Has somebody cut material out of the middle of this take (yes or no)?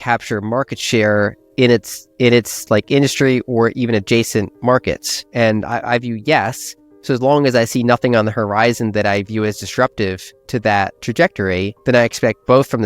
yes